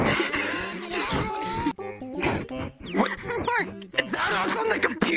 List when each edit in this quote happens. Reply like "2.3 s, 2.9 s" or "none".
1.7 s

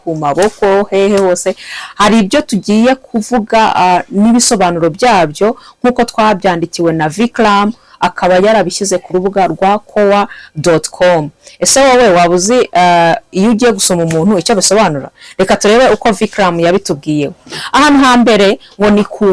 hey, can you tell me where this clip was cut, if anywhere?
none

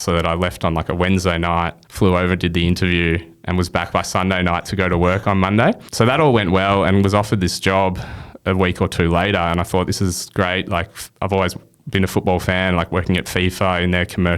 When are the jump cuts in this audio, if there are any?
1.8 s, 5.9 s

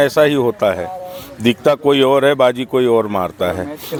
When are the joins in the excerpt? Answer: none

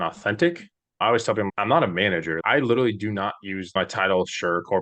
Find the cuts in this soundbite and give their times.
1.5 s, 2.4 s, 3.8 s

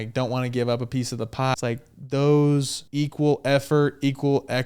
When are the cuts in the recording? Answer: 1.5 s, 2.8 s

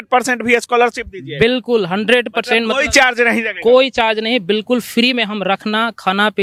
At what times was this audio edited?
none

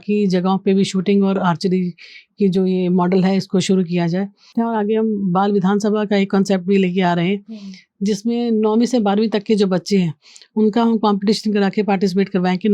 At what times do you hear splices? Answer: 4.5 s

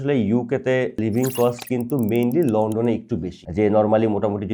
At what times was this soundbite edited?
1.0 s, 3.4 s

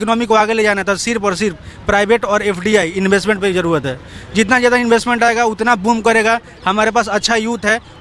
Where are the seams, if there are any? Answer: none

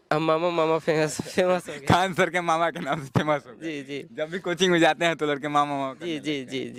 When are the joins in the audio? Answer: none

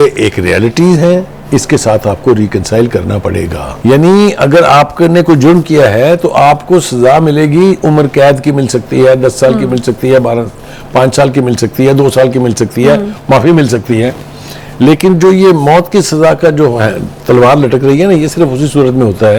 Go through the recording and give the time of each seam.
3.6 s

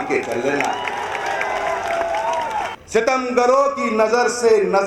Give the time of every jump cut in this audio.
2.8 s

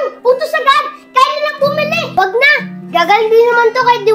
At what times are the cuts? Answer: 2.0 s

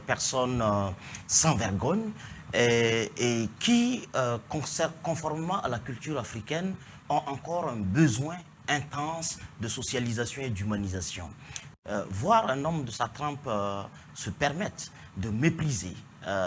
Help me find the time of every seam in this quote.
none

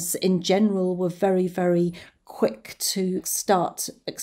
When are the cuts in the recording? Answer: 3.3 s

